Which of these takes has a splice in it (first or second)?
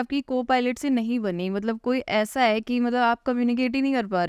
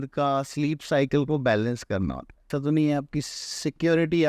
second